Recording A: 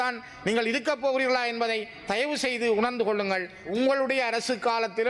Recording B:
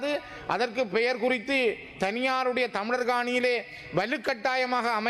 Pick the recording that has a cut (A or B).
A